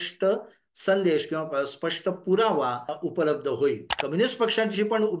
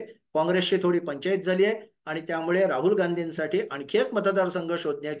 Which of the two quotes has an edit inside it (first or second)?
first